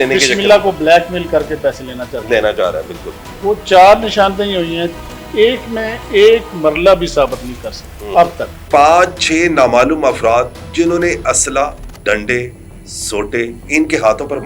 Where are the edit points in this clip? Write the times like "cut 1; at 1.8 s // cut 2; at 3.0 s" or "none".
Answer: cut 1; at 8.6 s // cut 2; at 11.9 s // cut 3; at 13.6 s